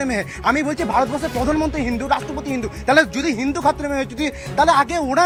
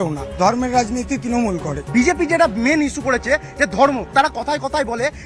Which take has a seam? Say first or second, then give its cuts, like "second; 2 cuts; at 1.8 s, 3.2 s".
second; 2 cuts; at 1.8 s, 4.1 s